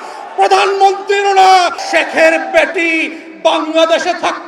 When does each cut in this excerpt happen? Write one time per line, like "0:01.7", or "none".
0:01.8